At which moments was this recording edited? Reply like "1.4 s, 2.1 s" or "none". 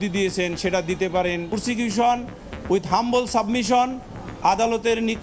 1.5 s

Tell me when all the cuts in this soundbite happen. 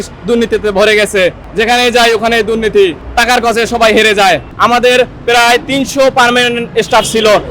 4.5 s

